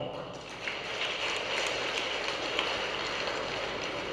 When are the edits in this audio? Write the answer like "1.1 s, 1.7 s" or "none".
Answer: none